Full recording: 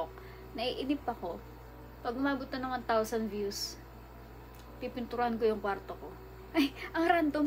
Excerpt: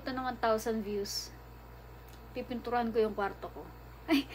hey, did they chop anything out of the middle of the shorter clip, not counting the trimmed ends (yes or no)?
no